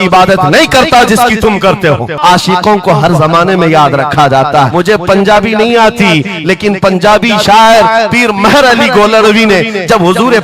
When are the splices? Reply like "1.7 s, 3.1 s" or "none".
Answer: 2.2 s, 4.7 s